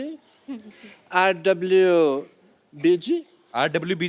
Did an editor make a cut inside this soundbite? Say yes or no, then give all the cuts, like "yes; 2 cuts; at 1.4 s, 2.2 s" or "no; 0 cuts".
no; 0 cuts